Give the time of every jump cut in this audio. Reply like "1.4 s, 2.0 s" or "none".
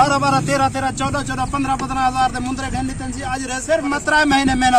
3.5 s